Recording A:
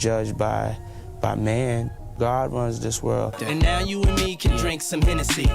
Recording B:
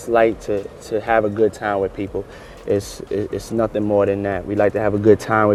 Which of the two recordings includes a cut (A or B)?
A